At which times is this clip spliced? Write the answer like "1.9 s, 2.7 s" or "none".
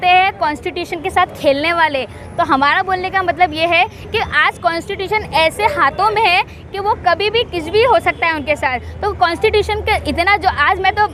none